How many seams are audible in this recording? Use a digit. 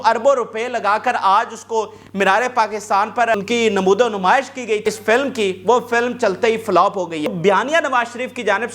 3